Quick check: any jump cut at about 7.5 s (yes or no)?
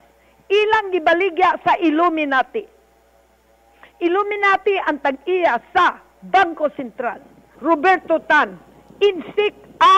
yes